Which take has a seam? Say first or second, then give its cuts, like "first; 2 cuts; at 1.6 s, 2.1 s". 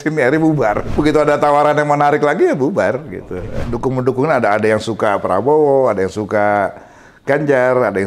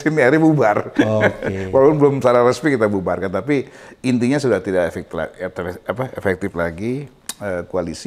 first; 2 cuts; at 0.9 s, 3.6 s